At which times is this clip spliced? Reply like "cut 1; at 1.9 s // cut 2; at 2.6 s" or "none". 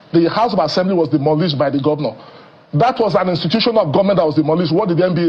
none